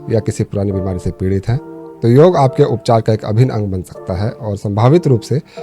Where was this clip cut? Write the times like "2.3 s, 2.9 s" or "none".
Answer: none